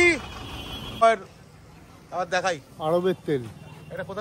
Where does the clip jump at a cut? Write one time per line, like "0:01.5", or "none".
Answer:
0:01.0